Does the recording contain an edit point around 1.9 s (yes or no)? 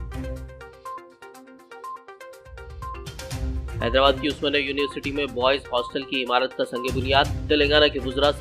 yes